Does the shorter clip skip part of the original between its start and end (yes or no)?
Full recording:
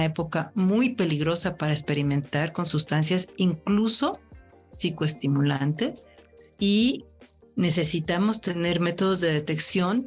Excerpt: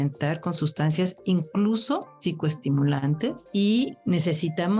yes